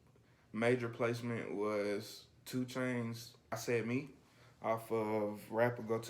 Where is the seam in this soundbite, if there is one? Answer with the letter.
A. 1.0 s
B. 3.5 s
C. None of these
B